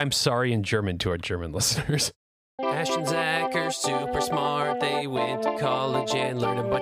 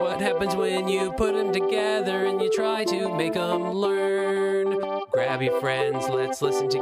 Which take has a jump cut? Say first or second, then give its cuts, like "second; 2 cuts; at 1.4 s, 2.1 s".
first; 1 cut; at 2.5 s